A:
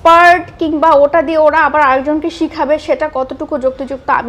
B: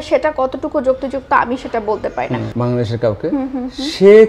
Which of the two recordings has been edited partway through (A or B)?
B